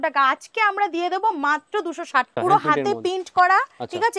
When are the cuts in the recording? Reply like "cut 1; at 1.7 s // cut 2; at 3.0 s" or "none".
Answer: cut 1; at 2.3 s